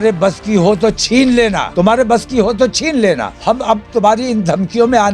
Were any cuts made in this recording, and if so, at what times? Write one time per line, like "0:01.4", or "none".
0:01.7
0:03.3